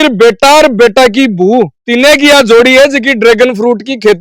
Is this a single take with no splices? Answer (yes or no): yes